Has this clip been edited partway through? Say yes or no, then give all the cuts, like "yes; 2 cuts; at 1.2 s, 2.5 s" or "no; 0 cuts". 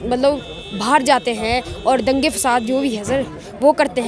no; 0 cuts